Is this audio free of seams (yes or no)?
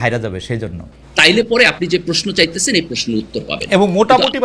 no